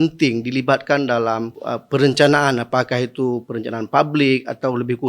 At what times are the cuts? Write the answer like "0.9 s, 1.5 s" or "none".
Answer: 1.6 s